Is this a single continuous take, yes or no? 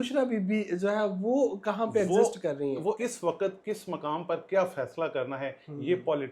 no